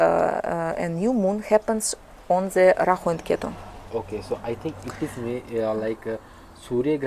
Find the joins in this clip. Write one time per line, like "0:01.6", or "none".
none